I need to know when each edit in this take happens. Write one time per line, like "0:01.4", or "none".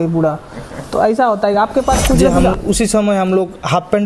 0:02.5